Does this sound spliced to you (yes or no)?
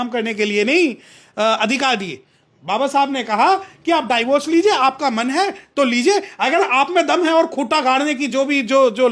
no